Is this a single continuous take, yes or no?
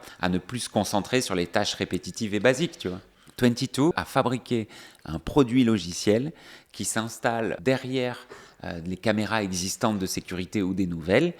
no